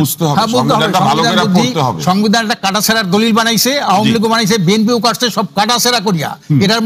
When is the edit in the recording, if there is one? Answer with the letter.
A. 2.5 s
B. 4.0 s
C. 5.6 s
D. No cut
D